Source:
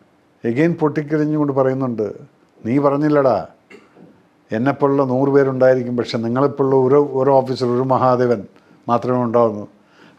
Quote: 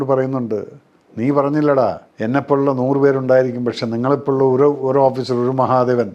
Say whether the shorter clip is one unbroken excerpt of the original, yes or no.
no